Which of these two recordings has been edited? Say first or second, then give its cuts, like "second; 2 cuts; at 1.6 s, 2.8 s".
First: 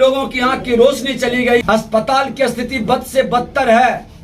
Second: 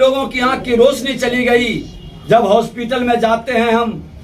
first; 1 cut; at 1.6 s